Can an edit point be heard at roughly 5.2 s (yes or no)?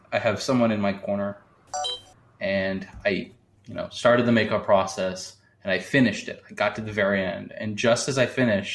no